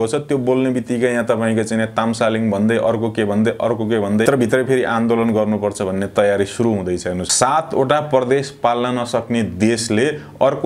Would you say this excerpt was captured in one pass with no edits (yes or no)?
no